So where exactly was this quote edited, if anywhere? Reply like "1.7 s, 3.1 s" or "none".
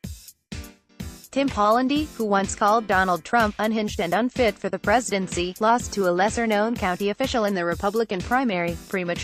1.3 s